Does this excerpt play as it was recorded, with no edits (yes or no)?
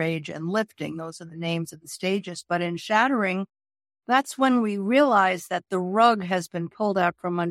yes